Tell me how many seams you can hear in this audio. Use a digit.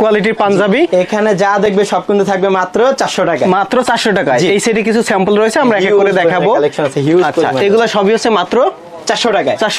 0